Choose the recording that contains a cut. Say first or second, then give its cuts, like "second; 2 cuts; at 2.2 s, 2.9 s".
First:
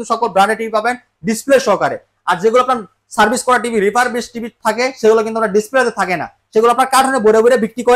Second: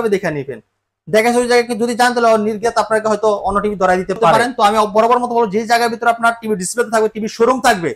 second; 1 cut; at 4.4 s